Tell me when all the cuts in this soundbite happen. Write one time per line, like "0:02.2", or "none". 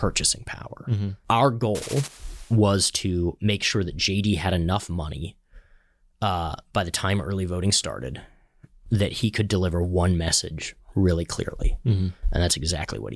0:01.2